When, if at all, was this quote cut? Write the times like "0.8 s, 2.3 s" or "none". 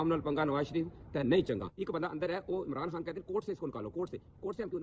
none

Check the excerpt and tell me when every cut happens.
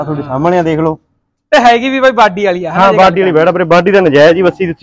none

